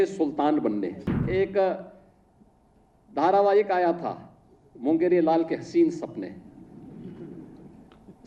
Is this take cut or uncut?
cut